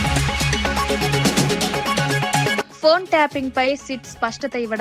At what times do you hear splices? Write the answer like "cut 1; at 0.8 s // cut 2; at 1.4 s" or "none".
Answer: cut 1; at 2.7 s